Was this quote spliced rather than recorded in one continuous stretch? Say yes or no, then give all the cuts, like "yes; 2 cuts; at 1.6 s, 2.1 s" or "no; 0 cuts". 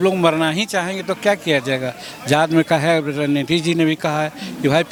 no; 0 cuts